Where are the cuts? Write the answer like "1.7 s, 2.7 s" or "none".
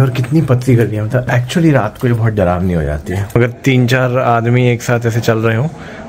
3.2 s